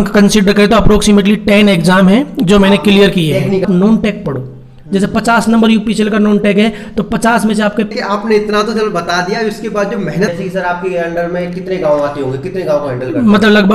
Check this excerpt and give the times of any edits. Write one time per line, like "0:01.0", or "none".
0:03.6
0:07.9
0:10.3